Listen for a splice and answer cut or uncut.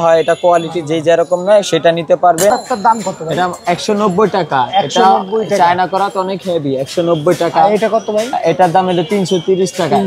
cut